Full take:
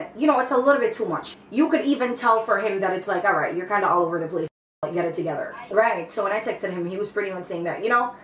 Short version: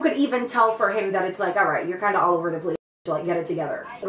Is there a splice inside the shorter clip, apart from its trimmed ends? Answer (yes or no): no